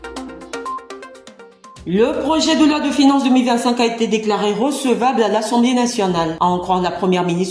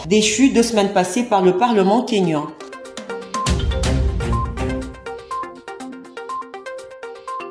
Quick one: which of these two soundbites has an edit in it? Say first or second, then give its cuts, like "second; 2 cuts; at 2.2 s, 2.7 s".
first; 1 cut; at 1.2 s